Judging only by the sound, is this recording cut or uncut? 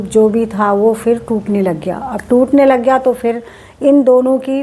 uncut